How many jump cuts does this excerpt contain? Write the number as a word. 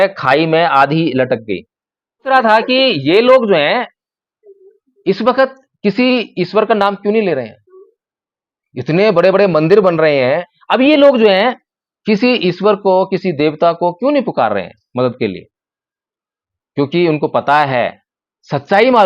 two